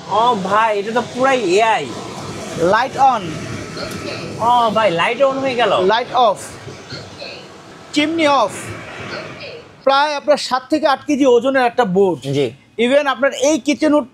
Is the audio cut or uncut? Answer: cut